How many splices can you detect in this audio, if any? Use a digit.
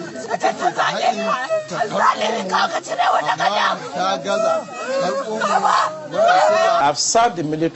1